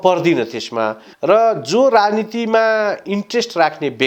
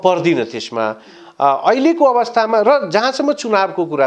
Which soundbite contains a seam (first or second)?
first